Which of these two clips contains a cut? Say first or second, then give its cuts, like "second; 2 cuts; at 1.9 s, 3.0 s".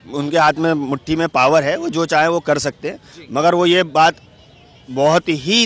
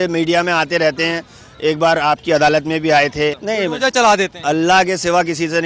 second; 1 cut; at 3.4 s